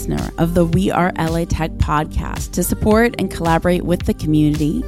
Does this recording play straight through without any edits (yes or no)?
yes